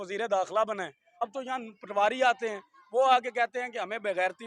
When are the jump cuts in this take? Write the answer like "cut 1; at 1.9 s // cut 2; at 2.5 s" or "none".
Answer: cut 1; at 1.0 s